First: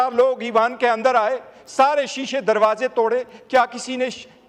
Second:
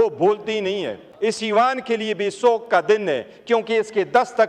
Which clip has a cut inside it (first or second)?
second